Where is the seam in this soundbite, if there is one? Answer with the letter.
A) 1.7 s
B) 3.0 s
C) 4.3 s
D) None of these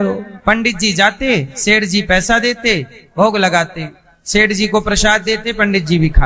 D